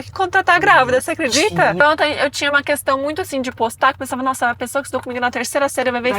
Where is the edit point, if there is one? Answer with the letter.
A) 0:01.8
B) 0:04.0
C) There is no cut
A